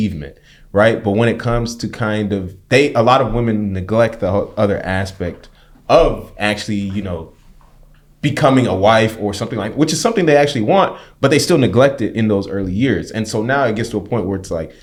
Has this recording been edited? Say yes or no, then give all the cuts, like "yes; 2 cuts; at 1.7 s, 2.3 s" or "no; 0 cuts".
no; 0 cuts